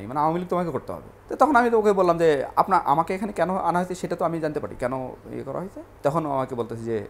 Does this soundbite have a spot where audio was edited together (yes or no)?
no